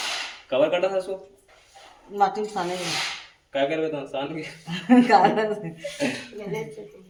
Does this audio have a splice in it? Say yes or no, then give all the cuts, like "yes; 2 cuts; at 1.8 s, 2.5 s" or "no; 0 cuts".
no; 0 cuts